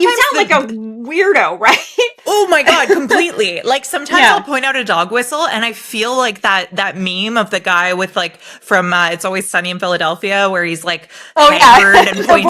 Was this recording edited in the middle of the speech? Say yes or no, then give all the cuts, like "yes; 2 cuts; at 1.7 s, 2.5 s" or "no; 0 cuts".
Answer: no; 0 cuts